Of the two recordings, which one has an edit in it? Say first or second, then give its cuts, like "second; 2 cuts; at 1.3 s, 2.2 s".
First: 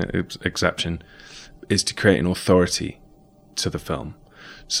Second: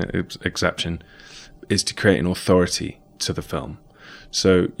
second; 1 cut; at 3.1 s